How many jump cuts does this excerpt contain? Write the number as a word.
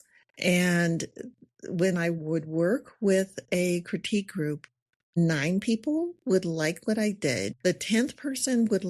one